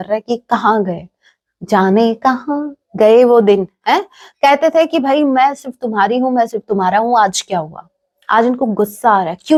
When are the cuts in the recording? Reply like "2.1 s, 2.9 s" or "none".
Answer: none